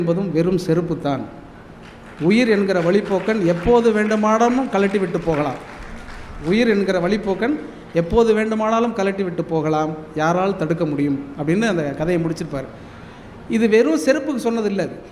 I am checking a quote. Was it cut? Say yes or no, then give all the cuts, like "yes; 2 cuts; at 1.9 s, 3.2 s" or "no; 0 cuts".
no; 0 cuts